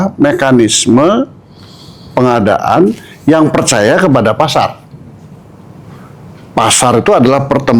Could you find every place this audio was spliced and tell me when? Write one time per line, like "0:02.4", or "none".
none